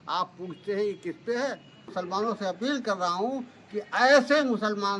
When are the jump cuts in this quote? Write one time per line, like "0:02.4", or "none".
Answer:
0:02.2